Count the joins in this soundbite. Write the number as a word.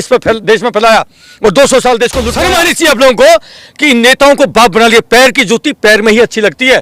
one